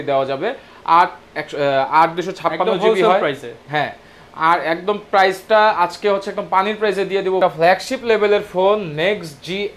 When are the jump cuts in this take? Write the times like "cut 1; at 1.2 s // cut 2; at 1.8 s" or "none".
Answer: cut 1; at 7.4 s

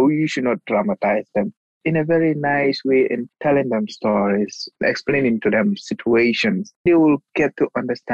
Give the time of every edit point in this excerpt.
cut 1; at 1.8 s // cut 2; at 3.3 s // cut 3; at 6.8 s

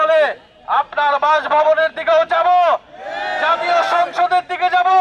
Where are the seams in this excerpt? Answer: none

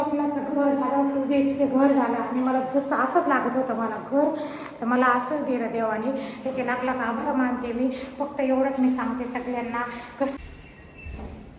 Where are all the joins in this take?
cut 1; at 10.4 s

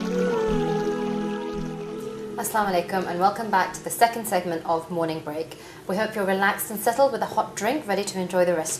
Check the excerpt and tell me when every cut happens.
cut 1; at 2.2 s

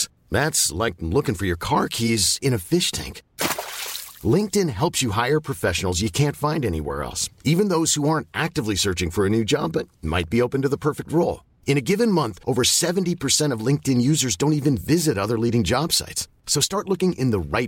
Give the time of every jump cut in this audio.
none

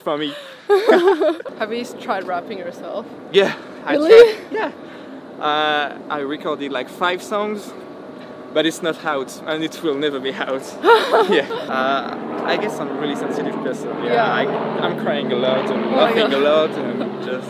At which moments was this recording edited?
cut 1; at 1.4 s // cut 2; at 11.6 s

